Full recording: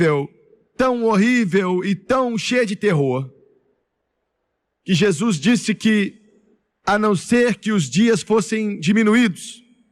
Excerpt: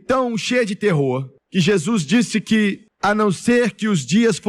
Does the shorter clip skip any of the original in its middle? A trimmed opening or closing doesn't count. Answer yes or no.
yes